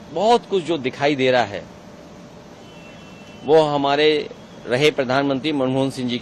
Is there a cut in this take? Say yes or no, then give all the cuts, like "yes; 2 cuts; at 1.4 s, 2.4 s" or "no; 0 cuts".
no; 0 cuts